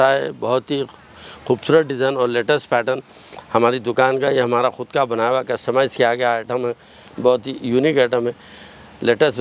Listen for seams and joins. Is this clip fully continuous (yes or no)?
yes